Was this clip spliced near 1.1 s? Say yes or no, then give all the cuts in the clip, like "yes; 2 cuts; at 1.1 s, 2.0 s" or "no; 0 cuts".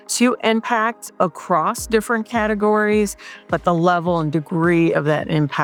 no; 0 cuts